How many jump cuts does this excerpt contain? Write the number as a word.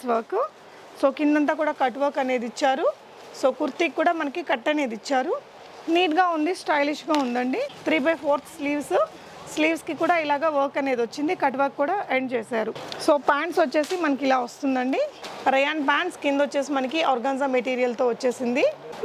zero